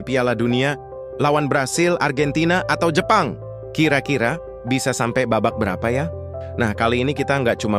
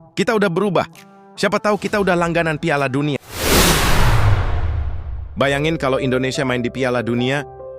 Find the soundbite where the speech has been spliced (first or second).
second